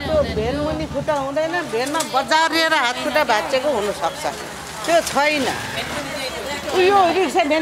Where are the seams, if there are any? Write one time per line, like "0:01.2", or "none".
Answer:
none